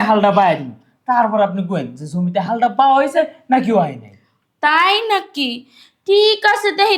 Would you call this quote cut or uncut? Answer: uncut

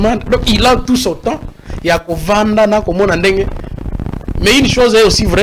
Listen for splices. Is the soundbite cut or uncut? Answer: uncut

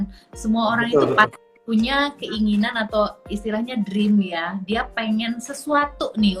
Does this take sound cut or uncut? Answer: uncut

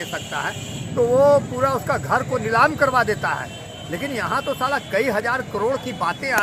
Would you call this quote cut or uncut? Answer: uncut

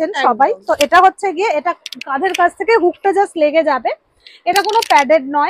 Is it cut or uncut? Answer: uncut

